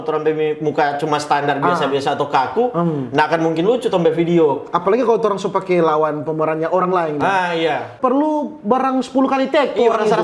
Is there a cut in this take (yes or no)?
yes